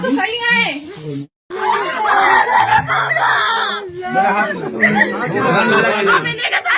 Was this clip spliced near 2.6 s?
no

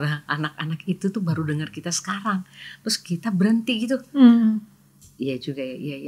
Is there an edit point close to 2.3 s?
no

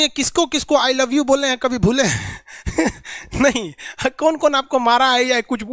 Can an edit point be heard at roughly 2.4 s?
no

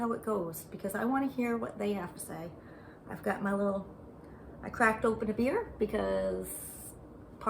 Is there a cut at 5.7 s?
no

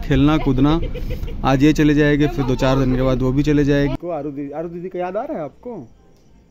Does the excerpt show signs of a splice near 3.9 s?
yes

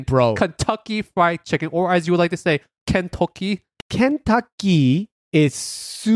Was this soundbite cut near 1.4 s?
no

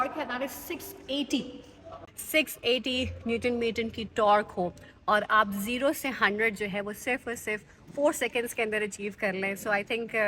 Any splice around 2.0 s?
yes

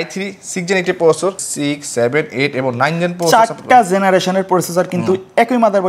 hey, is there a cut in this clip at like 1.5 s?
yes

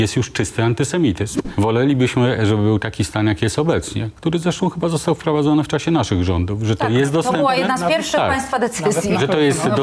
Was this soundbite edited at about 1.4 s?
yes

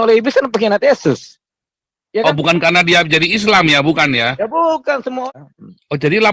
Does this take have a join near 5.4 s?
yes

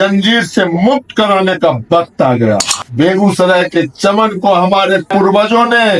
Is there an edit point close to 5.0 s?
no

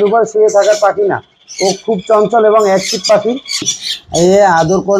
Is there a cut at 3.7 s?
yes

